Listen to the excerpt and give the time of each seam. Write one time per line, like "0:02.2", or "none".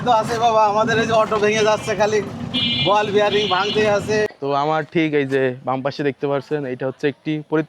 0:04.3